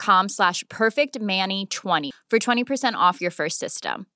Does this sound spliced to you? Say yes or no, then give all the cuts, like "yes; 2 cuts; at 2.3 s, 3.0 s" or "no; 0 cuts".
yes; 1 cut; at 2.1 s